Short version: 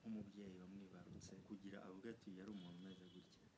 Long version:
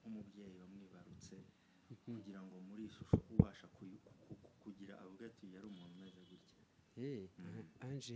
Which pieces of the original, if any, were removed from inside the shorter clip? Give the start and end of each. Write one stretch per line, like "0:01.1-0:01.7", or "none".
0:01.3-0:04.5

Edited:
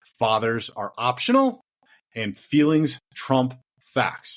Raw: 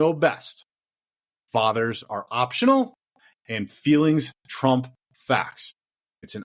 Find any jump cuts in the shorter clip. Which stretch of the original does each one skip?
none

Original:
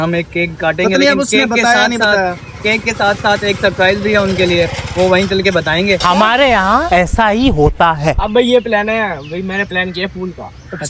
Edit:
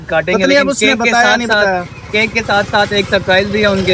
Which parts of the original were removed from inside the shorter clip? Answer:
none

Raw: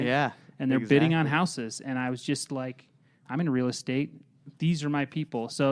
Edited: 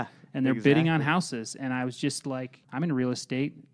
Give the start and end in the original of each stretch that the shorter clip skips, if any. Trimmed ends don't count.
0:02.8-0:03.1

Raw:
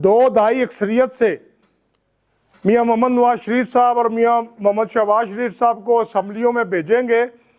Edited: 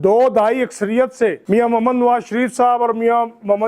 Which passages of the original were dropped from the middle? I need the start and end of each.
0:01.4-0:02.6

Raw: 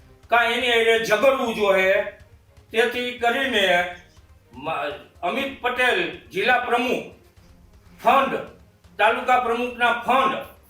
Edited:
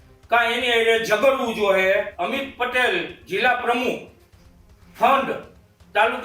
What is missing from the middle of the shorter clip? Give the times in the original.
0:02.1-0:05.2

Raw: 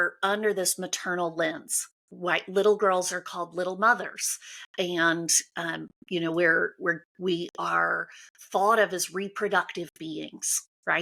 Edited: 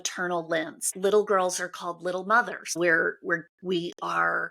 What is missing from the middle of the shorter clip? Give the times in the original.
0:01.8-0:02.4
0:04.3-0:06.3

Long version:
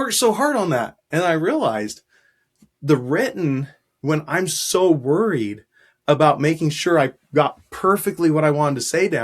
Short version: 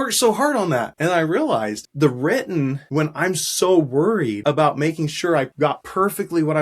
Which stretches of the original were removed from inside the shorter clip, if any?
0:00.9-0:01.0
0:02.0-0:02.7
0:03.7-0:03.9
0:05.5-0:06.0
0:07.3-0:07.5

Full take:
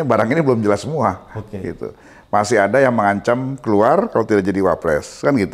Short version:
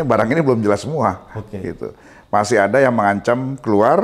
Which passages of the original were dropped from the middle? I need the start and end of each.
none

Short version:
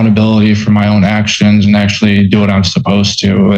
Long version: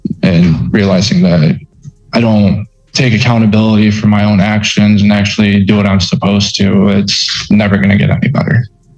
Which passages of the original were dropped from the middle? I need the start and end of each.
none

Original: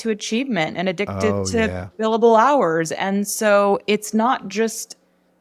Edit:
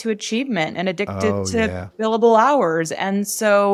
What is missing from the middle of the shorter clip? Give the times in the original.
none

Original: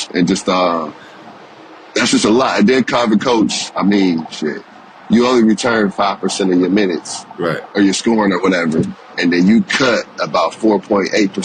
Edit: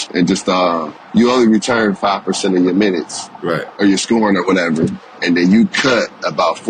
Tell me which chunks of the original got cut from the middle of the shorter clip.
0:00.9-0:04.9

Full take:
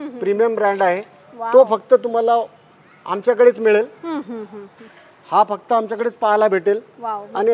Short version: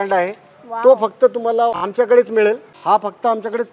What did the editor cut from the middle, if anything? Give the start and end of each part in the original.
0:02.5-0:03.1
0:04.0-0:05.2

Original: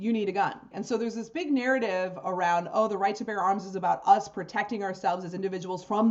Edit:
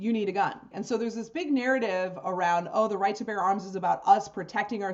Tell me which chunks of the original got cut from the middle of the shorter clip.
none

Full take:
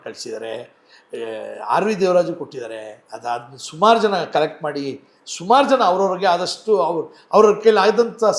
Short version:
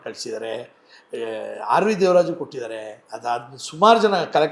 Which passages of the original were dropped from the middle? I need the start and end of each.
none

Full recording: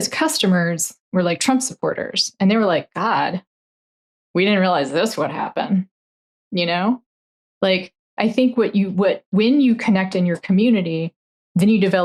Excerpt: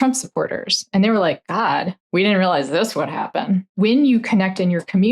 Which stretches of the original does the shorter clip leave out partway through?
0:03.4-0:04.2
0:05.9-0:09.2

